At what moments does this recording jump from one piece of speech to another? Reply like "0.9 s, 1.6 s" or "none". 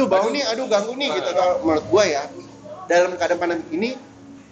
1.4 s